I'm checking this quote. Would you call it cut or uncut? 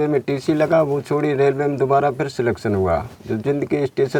uncut